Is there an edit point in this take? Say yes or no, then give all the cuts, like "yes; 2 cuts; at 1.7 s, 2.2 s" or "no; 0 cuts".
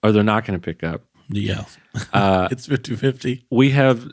no; 0 cuts